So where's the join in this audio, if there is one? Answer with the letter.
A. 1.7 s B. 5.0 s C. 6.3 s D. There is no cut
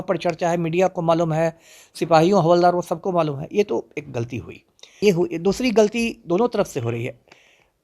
B